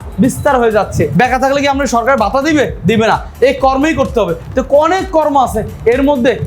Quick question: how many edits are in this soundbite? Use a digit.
1